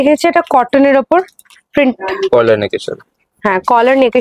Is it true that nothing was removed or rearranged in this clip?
yes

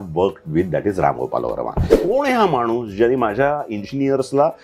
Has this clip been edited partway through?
yes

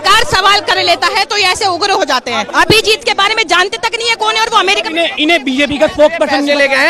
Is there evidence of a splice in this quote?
yes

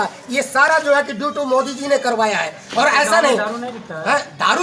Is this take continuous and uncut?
yes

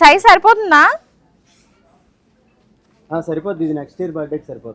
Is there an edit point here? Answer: no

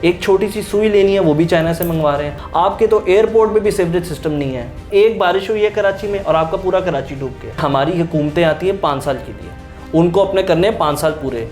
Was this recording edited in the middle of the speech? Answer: yes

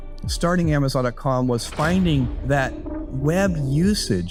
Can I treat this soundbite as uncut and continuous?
yes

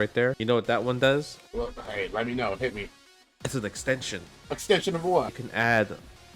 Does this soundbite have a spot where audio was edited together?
yes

